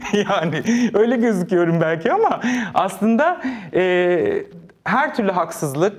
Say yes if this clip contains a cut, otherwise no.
no